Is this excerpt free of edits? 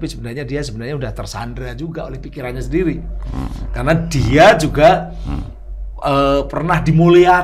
yes; 0 cuts

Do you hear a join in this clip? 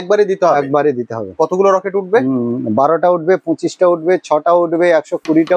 no; 0 cuts

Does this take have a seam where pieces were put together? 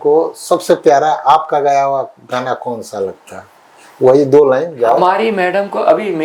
no; 0 cuts

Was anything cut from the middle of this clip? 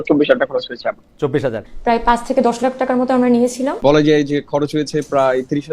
yes; 2 cuts; at 1.7 s, 3.8 s

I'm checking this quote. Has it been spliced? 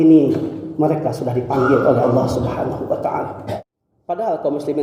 yes; 1 cut; at 3.6 s

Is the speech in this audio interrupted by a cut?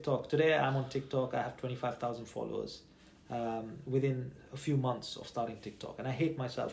no; 0 cuts

